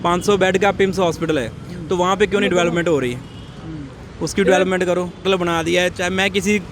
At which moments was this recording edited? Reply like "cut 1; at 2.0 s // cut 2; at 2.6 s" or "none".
cut 1; at 5.2 s